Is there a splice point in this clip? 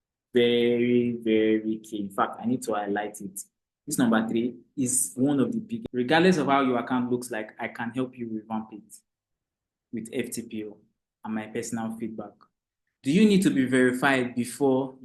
yes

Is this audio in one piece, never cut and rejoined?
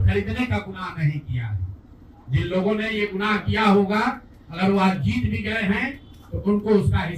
yes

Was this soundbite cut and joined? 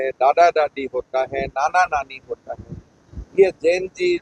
no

